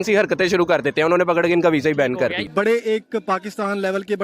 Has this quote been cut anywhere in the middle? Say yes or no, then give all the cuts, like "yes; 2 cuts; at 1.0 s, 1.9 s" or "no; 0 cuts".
yes; 1 cut; at 2.4 s